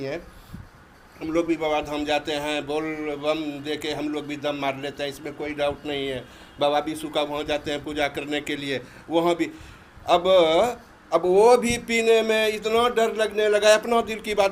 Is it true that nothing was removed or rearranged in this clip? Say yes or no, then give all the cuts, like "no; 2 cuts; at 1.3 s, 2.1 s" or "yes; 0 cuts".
yes; 0 cuts